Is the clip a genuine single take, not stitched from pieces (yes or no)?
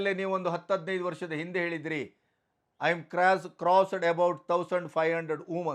yes